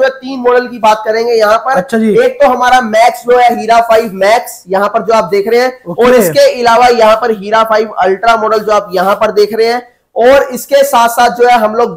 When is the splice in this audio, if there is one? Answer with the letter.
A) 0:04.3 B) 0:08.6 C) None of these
C